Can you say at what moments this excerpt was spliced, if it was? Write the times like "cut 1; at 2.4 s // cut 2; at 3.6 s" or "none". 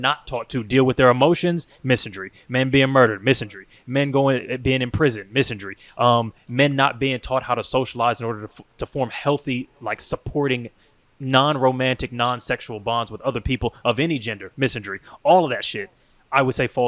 none